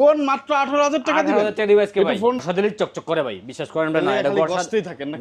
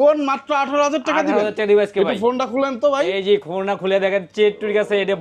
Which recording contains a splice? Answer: first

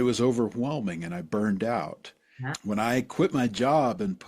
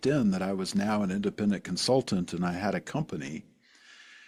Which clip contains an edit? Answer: first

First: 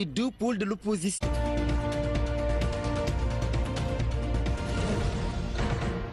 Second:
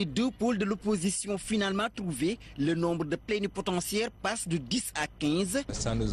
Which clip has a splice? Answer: second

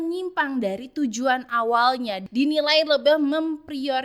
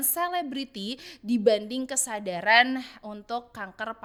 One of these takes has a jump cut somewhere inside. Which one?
first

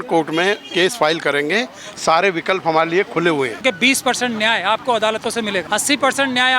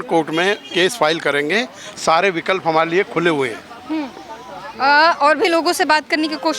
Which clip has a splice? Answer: first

